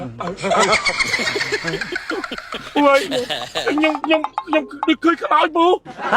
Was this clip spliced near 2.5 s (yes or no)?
yes